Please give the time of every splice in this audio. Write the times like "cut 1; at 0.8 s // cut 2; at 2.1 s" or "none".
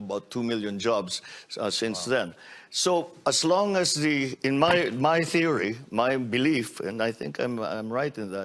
none